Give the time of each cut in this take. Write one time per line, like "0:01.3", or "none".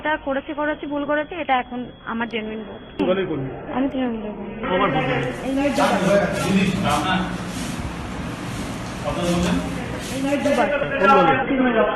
0:05.8
0:10.0